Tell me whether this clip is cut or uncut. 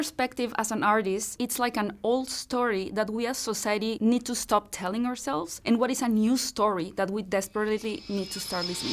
cut